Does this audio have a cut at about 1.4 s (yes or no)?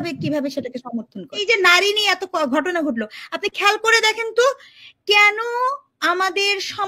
yes